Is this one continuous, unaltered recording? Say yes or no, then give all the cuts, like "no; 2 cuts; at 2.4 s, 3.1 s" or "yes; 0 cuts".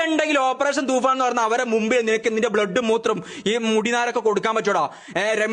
yes; 0 cuts